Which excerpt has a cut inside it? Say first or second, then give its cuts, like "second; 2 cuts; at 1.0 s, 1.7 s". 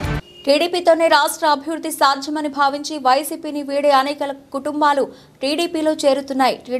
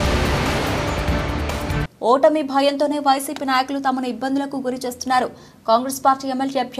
second; 1 cut; at 1.9 s